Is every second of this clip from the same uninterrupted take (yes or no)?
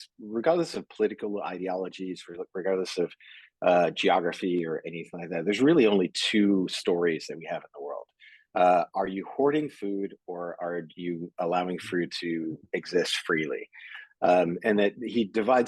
yes